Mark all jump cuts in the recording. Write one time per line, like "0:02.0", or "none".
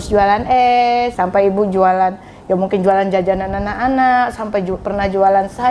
0:01.1